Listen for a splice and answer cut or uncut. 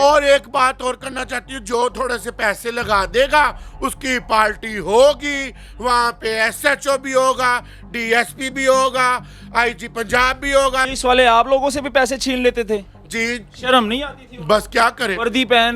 cut